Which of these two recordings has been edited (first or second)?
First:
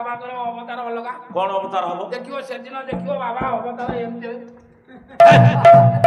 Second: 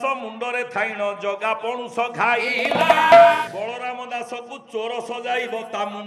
second